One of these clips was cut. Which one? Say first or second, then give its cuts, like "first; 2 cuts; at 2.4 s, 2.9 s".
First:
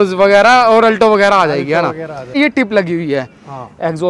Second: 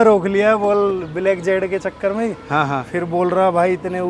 first; 1 cut; at 2.4 s